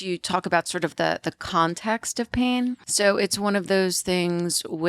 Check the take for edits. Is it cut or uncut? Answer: cut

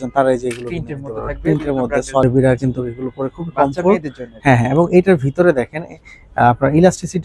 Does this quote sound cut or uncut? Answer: cut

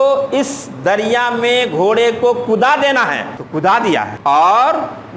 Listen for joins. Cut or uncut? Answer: cut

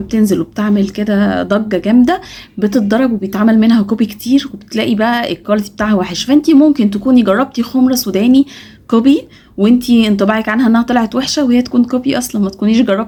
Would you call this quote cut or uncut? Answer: uncut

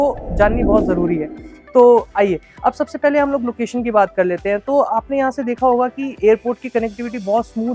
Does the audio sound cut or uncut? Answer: uncut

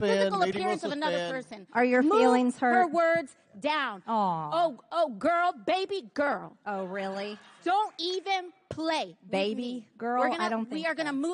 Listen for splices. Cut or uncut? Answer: uncut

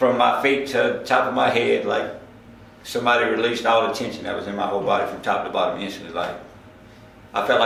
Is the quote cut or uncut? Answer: uncut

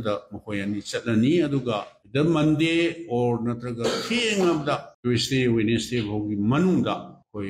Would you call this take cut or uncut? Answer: uncut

